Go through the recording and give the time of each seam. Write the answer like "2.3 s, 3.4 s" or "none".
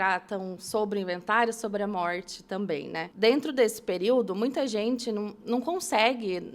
3.0 s